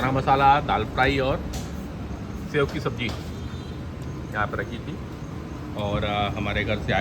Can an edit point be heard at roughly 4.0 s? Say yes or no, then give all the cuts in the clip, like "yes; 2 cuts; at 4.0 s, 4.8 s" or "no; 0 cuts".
no; 0 cuts